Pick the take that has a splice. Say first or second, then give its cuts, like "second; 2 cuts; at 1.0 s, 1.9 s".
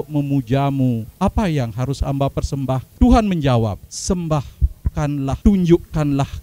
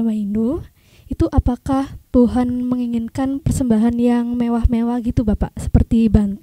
first; 4 cuts; at 1.1 s, 2.9 s, 3.8 s, 5.4 s